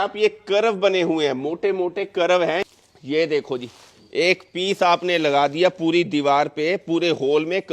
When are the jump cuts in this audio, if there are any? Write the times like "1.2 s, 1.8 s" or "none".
2.8 s